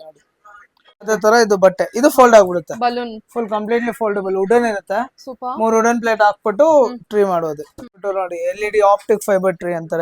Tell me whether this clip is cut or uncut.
cut